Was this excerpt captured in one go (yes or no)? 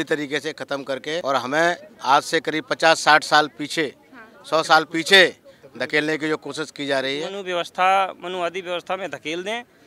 no